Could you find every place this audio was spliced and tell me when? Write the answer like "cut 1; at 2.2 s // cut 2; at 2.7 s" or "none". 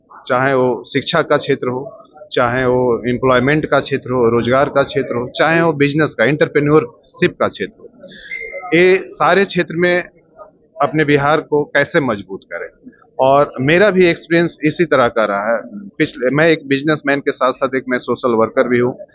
none

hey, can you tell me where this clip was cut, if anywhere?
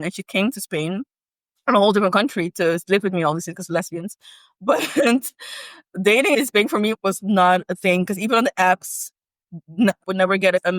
none

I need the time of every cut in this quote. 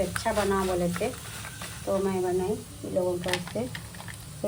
none

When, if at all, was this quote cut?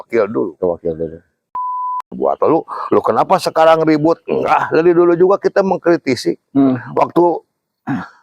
cut 1; at 1.5 s

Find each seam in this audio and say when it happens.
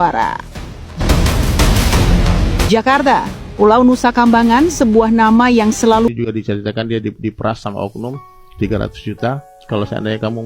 cut 1; at 6.1 s

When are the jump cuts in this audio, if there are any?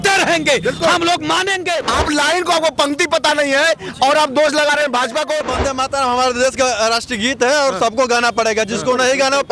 cut 1; at 1.8 s // cut 2; at 5.4 s

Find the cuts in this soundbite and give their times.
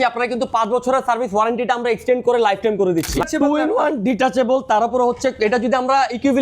cut 1; at 3.3 s

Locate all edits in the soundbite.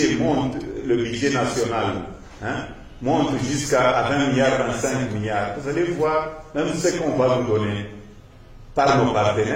none

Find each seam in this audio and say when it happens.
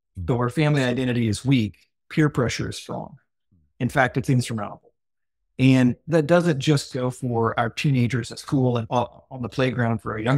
cut 1; at 6.0 s // cut 2; at 8.9 s

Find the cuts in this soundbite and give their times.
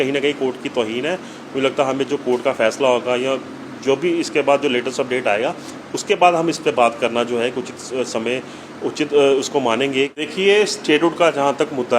cut 1; at 10.2 s

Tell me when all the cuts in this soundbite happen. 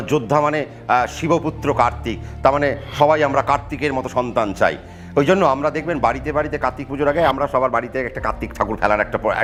none

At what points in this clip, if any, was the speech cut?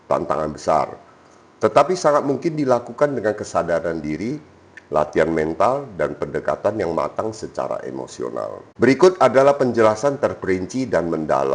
cut 1; at 8.6 s

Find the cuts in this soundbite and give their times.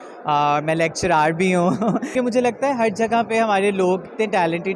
cut 1; at 2.1 s

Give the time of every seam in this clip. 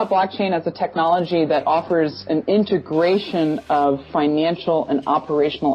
none

